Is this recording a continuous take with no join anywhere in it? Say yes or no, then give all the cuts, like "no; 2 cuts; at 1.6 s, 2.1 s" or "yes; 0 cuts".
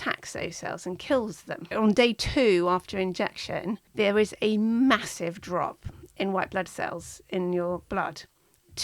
no; 2 cuts; at 1.7 s, 3.8 s